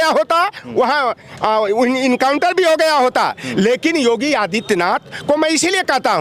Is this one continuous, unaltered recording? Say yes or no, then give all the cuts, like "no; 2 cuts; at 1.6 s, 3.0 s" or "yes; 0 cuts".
yes; 0 cuts